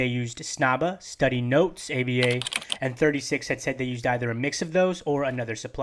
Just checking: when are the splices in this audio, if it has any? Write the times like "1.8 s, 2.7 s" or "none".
none